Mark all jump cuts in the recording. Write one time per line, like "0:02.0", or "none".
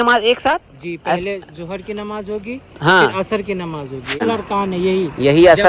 0:04.2